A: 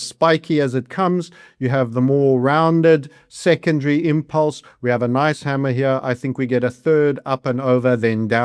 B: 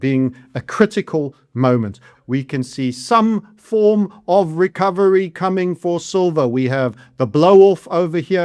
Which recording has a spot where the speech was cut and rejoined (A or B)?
B